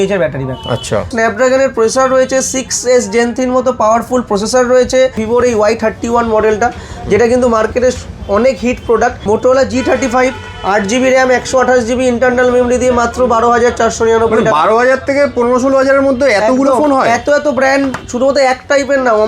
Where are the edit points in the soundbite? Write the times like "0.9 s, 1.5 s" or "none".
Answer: 1.1 s, 5.2 s, 9.2 s